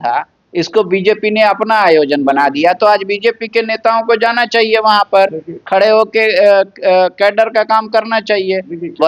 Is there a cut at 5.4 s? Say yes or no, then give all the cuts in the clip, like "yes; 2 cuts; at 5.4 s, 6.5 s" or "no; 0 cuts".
no; 0 cuts